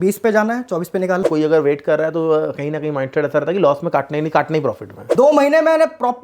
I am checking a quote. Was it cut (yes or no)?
yes